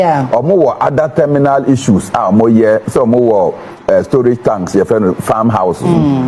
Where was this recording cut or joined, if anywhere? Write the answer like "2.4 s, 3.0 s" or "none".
none